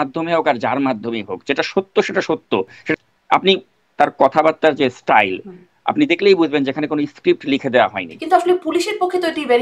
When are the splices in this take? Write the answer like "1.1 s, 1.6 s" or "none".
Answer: 2.9 s, 8.1 s